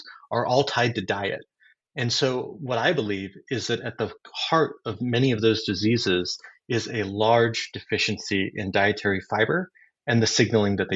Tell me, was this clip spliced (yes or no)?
no